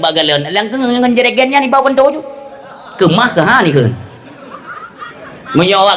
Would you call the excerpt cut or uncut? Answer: uncut